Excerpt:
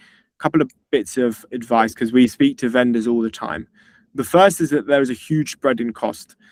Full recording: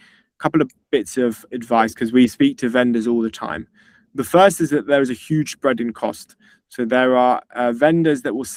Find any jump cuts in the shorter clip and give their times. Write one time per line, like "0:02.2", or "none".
none

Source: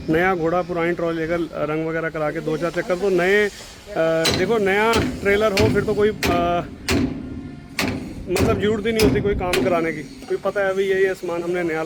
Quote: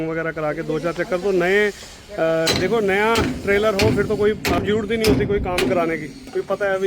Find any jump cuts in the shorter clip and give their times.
0:04.6

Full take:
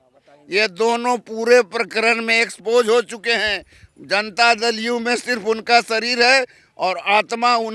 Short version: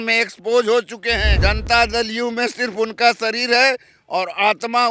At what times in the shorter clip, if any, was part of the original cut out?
0:01.3

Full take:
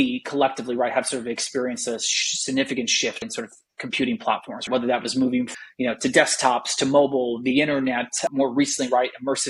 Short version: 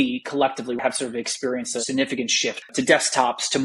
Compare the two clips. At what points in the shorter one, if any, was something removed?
0:00.8
0:01.8
0:02.7

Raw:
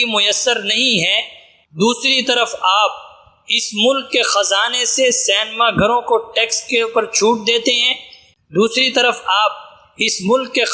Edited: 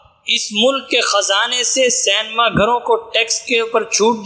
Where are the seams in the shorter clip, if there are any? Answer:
none

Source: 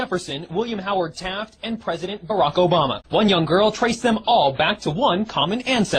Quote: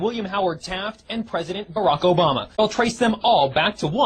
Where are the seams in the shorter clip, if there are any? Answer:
0:02.6

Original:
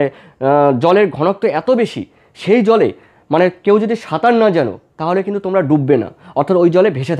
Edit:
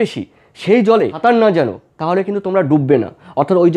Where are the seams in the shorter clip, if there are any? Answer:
0:01.1

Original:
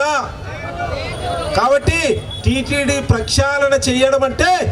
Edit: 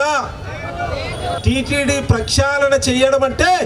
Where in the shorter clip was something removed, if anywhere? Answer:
0:01.4

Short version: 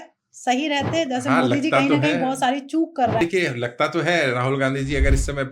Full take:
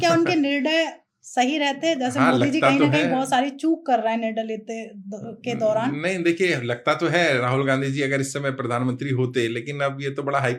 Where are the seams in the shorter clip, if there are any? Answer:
0:03.2

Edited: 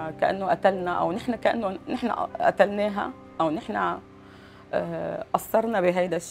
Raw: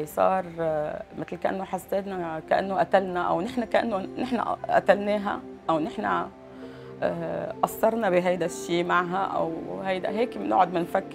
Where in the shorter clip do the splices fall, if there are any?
none

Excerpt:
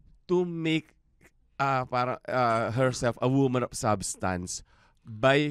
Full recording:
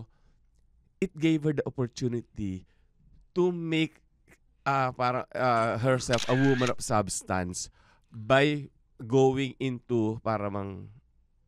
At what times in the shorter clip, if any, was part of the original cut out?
none

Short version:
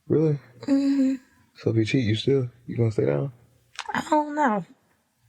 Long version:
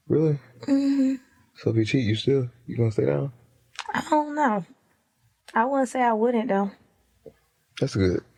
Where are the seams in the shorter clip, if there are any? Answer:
none

